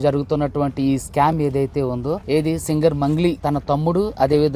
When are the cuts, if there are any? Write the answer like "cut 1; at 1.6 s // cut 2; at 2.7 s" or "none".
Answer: cut 1; at 2.2 s // cut 2; at 3.4 s